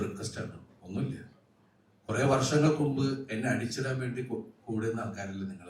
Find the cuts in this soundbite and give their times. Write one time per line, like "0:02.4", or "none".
none